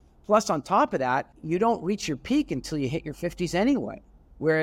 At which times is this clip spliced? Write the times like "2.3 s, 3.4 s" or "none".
1.3 s